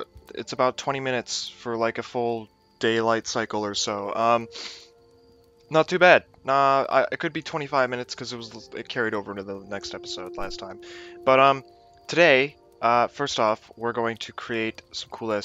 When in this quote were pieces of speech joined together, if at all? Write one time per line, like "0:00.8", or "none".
0:03.9

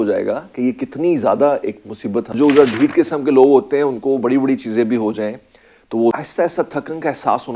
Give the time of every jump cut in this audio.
0:02.3
0:06.2

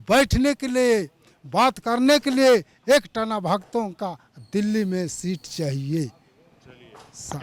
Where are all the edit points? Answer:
none

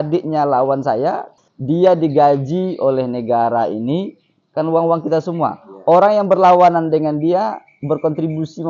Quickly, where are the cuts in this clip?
0:01.3

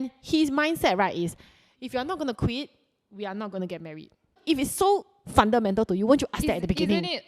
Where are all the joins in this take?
0:04.4

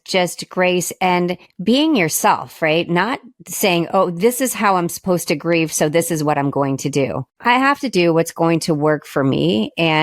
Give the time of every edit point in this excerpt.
0:01.5
0:07.3

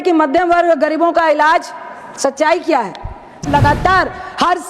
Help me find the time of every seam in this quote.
0:03.5

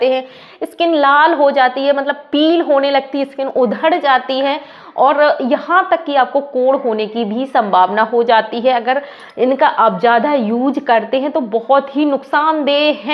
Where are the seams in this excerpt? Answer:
none

